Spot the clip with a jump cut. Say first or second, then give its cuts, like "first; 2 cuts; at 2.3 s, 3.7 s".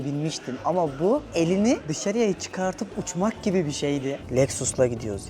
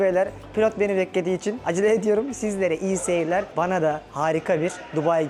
first; 1 cut; at 4.2 s